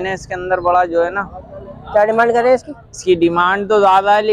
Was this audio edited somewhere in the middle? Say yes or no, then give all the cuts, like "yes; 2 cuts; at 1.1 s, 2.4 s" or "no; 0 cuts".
no; 0 cuts